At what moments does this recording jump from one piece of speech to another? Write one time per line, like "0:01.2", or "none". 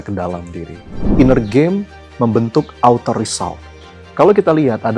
0:01.0